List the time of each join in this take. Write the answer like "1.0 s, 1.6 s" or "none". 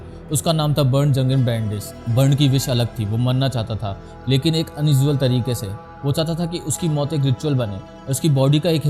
2.0 s